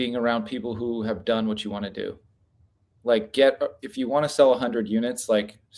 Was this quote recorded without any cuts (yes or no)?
yes